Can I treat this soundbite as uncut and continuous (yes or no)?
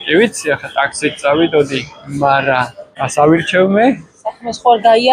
yes